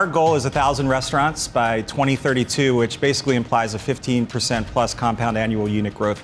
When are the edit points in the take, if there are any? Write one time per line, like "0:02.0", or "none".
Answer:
none